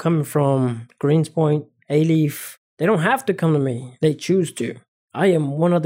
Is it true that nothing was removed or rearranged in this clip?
no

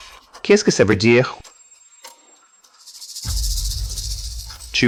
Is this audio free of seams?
yes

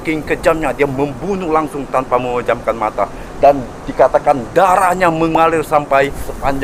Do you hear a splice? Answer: no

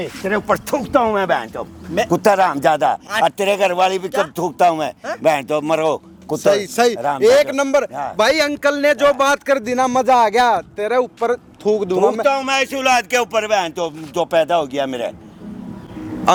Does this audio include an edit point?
no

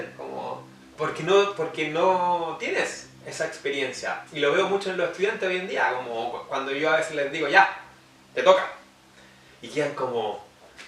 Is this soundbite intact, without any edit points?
yes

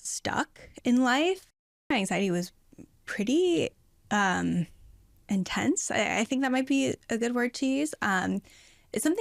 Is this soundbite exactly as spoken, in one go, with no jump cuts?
no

